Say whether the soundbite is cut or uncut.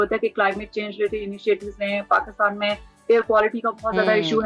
uncut